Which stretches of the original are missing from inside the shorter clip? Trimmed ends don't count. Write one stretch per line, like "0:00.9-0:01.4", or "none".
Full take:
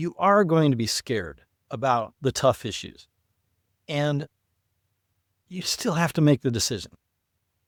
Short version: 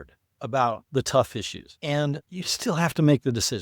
0:02.9-0:03.7
0:04.3-0:05.5